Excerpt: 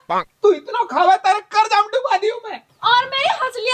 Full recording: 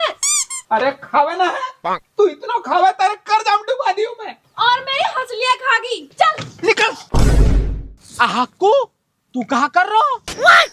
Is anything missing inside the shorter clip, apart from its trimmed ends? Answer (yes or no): no